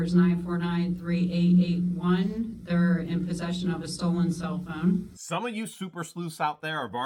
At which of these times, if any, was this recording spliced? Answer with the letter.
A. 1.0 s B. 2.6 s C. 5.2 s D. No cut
D